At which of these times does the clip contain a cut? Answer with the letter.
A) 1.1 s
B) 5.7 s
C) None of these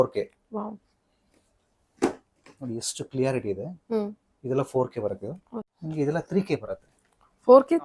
B